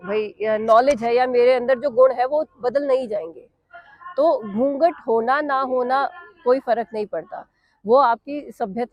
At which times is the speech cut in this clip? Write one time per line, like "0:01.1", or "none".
none

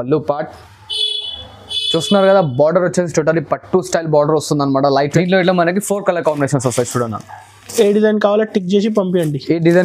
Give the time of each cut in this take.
0:05.1

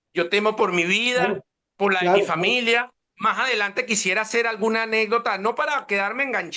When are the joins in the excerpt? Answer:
none

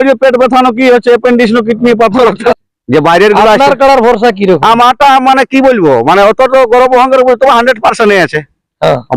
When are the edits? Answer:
0:02.6

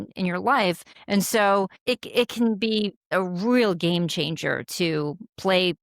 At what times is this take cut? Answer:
0:00.9
0:01.8
0:03.1

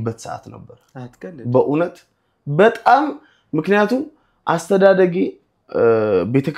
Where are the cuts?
none

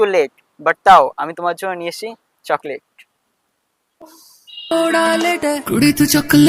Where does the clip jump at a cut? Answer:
none

